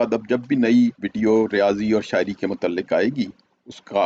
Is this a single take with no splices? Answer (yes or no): no